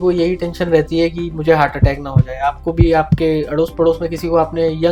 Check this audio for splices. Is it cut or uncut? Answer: uncut